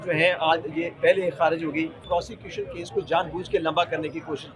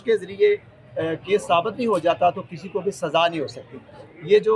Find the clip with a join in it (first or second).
first